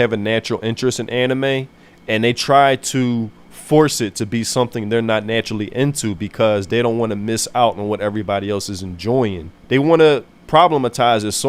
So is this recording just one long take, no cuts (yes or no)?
yes